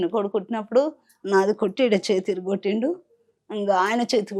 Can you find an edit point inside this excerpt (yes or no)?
no